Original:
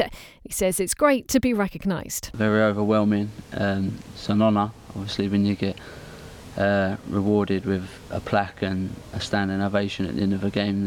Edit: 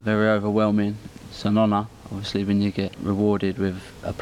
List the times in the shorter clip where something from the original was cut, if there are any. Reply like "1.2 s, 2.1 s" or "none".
1.1 s, 3.0 s

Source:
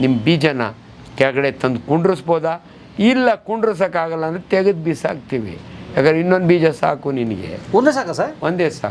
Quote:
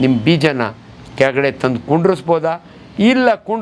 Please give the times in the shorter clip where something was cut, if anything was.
none

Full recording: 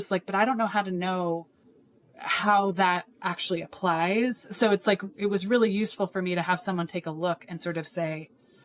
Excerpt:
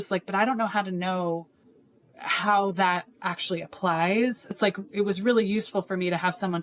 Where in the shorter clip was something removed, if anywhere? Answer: 4.6 s

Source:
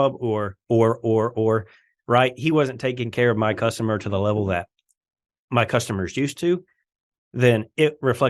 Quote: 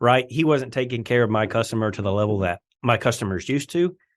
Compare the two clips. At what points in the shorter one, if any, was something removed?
2.7 s

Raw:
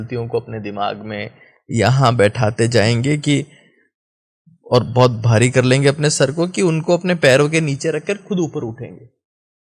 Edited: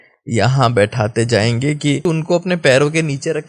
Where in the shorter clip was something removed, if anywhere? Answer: 2.0 s

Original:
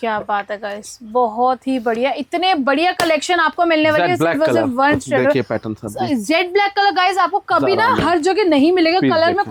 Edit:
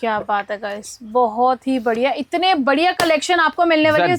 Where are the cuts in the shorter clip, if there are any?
none

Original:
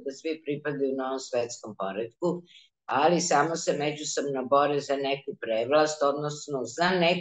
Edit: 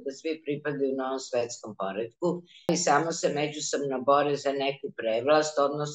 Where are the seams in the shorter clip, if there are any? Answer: 2.7 s

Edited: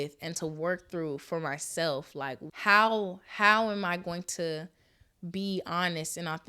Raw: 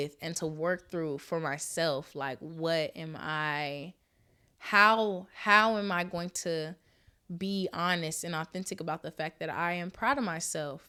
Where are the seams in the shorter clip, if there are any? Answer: 2.5 s

